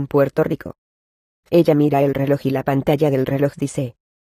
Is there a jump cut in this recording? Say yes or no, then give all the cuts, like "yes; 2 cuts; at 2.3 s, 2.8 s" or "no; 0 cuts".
yes; 1 cut; at 2.2 s